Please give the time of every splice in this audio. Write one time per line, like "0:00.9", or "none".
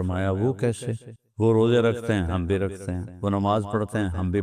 0:01.1